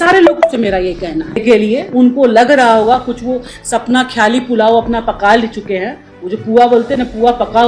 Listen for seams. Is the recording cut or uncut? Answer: cut